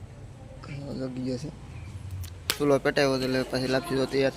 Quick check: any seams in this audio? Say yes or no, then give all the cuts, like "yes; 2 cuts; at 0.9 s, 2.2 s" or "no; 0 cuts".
yes; 1 cut; at 2.5 s